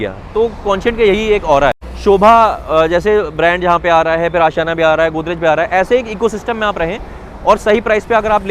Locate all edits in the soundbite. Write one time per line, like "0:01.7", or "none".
0:01.9